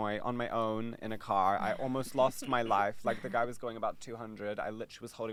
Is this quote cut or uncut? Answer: uncut